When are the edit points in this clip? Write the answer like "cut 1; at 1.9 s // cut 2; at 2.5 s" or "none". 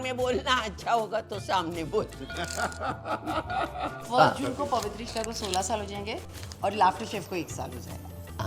none